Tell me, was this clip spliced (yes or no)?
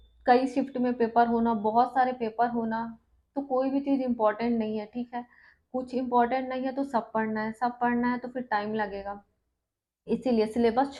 no